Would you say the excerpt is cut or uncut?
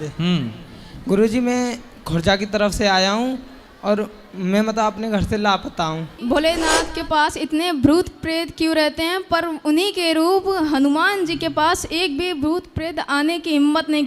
cut